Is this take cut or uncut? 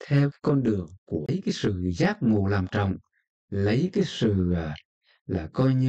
cut